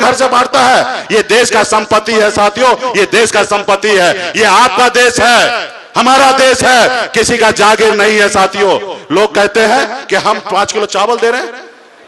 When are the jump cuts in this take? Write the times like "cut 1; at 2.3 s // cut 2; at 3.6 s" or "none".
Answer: none